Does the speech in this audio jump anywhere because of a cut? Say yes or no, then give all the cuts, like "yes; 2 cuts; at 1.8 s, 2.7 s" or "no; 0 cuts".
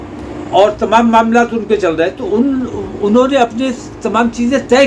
no; 0 cuts